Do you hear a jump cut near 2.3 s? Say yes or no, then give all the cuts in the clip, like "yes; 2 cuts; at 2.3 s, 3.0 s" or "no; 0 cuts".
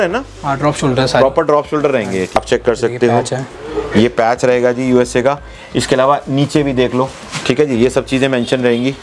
yes; 1 cut; at 2.3 s